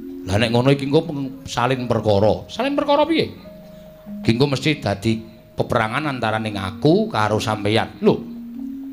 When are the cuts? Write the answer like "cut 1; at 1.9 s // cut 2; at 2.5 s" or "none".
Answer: cut 1; at 6.3 s